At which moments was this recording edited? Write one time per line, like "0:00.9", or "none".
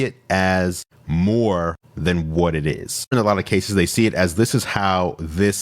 0:03.1